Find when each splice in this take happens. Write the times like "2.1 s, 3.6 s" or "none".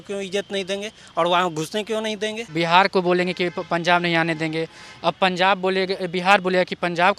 2.4 s